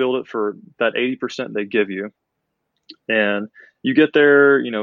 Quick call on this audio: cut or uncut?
uncut